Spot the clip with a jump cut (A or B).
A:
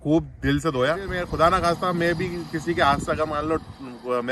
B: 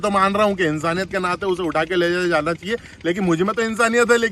A